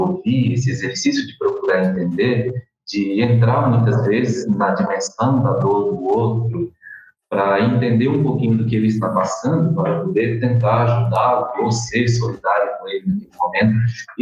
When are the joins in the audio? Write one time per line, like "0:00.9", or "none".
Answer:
none